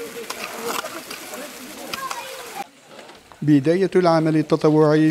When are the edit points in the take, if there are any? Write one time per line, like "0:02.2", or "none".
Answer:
none